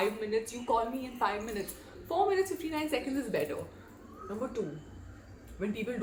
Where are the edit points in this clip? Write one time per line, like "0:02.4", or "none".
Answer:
none